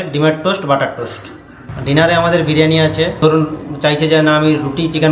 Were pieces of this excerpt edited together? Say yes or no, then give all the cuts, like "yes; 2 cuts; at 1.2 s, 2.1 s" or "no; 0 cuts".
yes; 2 cuts; at 1.5 s, 3.2 s